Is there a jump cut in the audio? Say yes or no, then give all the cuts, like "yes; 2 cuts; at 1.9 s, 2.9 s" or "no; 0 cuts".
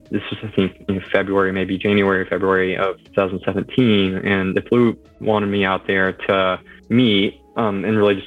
yes; 1 cut; at 6.7 s